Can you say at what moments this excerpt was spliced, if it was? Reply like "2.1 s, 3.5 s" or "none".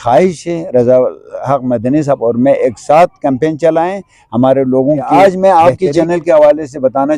5.1 s

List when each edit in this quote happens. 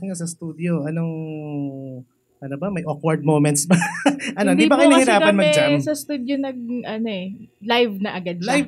none

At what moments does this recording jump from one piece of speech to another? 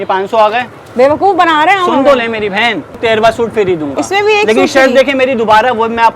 3.0 s

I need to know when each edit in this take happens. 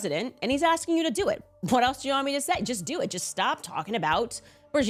none

